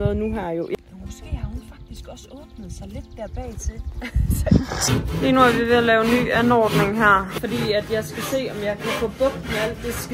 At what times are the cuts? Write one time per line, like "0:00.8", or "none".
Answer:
0:00.8
0:04.9
0:07.4

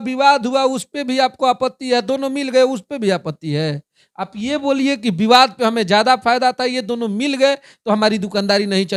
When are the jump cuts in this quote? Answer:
none

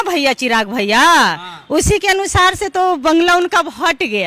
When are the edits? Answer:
none

